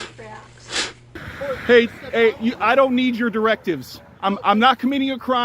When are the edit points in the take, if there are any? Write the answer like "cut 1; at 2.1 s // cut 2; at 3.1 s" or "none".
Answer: cut 1; at 1.2 s

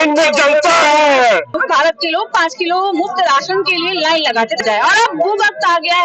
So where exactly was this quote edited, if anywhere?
cut 1; at 1.6 s // cut 2; at 4.6 s

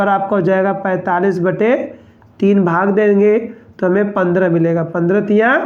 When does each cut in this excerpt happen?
none

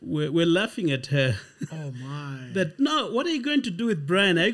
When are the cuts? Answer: none

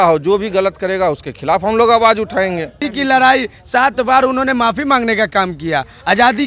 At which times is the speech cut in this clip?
cut 1; at 2.8 s

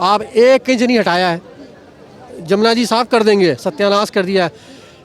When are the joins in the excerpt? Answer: none

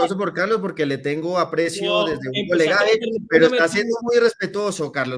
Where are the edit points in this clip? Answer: none

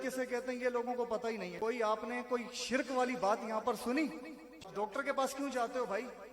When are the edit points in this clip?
cut 1; at 1.5 s // cut 2; at 4.7 s

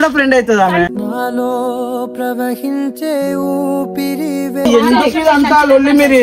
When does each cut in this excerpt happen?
cut 1; at 4.6 s

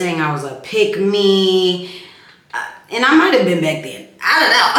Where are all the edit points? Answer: none

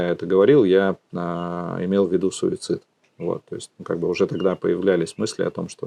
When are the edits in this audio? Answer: none

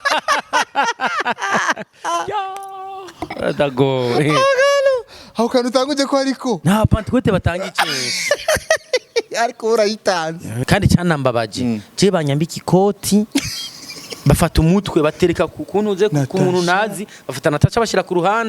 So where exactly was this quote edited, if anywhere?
cut 1; at 10.6 s

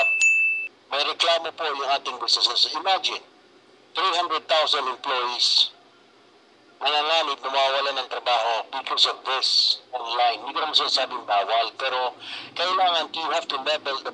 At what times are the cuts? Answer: none

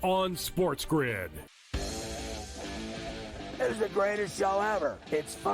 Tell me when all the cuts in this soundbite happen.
cut 1; at 1.2 s

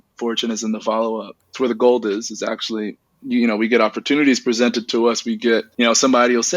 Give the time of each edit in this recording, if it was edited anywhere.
cut 1; at 1.4 s // cut 2; at 5.7 s

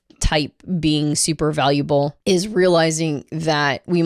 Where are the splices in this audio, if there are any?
cut 1; at 2.2 s

